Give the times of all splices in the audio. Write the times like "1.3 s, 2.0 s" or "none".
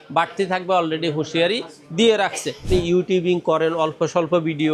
2.6 s